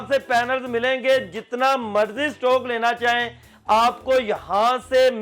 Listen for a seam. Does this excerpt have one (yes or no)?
no